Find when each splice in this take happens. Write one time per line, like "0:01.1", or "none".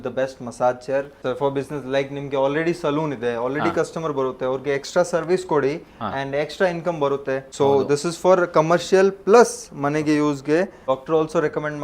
0:01.2
0:07.5
0:10.8